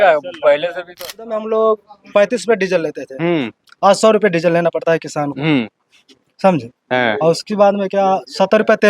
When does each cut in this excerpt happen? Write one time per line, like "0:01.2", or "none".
0:01.0